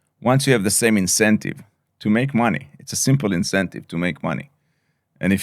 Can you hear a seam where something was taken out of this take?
no; 0 cuts

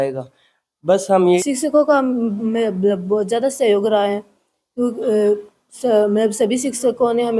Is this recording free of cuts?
no; 1 cut; at 1.4 s

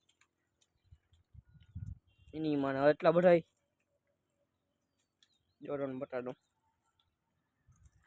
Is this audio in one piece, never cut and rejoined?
yes; 0 cuts

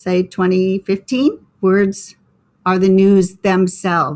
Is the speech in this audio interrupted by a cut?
yes; 1 cut; at 1.5 s

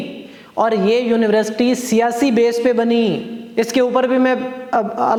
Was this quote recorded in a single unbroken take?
yes; 0 cuts

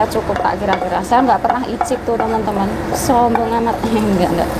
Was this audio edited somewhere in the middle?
no; 0 cuts

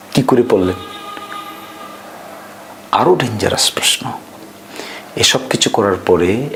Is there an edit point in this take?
no; 0 cuts

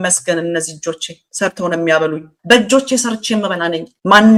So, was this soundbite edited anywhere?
no; 0 cuts

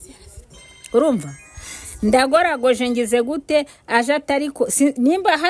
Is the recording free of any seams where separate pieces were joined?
yes; 0 cuts

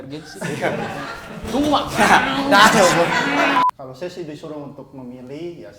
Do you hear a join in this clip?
yes; 1 cut; at 3.6 s

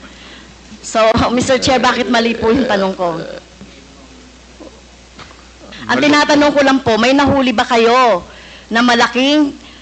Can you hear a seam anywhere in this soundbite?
no; 0 cuts

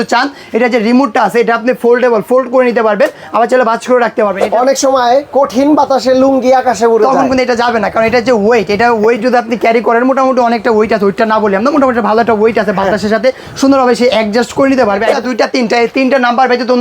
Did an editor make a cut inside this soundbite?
yes; 2 cuts; at 4.4 s, 15.1 s

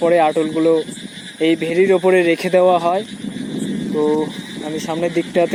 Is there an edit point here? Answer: no; 0 cuts

